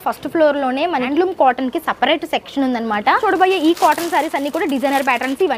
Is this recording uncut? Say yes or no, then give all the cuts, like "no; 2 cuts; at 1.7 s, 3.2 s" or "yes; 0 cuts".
no; 2 cuts; at 1.1 s, 3.2 s